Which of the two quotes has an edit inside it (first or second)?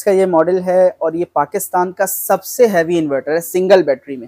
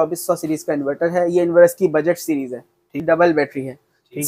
second